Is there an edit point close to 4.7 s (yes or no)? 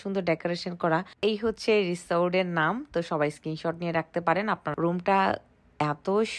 yes